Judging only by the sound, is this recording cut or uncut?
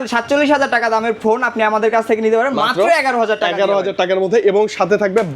uncut